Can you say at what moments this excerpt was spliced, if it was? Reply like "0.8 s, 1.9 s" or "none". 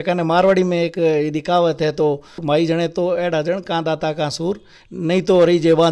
none